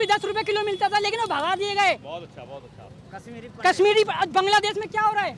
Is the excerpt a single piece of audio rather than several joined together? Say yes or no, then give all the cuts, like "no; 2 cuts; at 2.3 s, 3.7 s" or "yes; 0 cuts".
yes; 0 cuts